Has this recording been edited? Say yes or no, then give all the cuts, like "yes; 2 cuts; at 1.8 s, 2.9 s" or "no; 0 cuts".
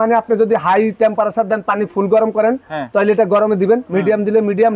no; 0 cuts